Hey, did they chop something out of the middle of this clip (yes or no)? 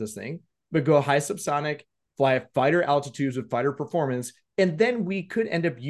no